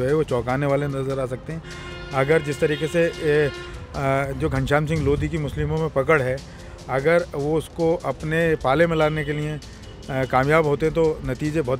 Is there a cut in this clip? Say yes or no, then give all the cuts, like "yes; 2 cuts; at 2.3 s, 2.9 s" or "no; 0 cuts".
no; 0 cuts